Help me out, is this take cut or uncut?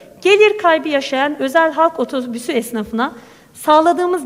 uncut